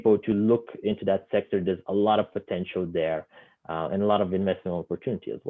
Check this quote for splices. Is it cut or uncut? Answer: uncut